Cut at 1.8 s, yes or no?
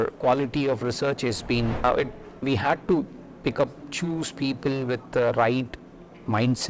yes